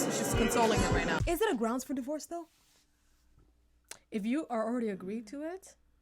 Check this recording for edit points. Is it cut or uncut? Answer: cut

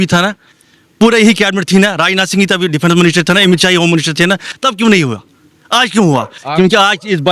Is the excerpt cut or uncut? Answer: uncut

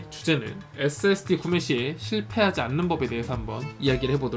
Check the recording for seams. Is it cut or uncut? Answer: uncut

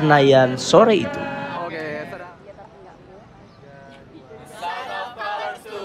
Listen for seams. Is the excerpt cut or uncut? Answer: uncut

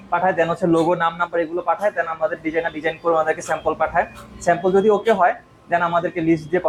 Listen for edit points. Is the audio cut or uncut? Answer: uncut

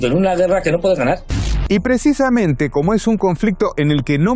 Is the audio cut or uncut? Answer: uncut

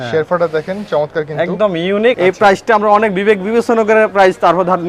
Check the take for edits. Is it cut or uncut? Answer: cut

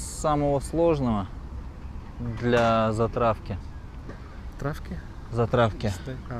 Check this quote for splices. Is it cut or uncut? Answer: uncut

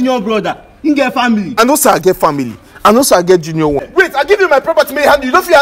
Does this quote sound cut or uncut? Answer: cut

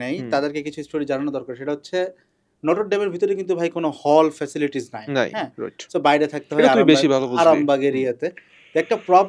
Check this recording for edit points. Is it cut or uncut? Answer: uncut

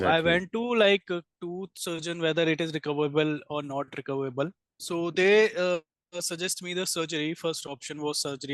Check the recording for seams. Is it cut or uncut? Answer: cut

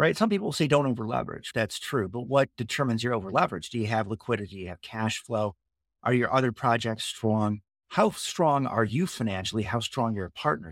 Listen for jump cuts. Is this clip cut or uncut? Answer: cut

